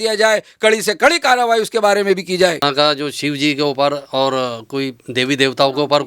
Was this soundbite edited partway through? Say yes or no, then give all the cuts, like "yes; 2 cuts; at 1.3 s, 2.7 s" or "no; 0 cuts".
yes; 1 cut; at 2.6 s